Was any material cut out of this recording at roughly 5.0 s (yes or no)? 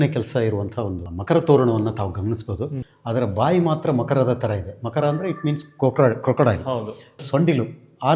no